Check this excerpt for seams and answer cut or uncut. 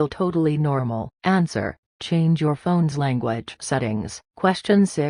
cut